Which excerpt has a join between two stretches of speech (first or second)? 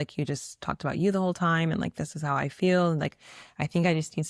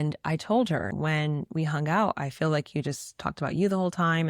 second